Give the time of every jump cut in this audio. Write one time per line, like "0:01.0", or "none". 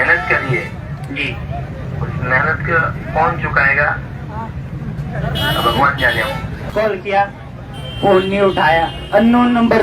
0:06.7